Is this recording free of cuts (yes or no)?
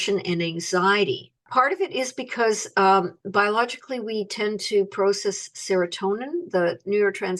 yes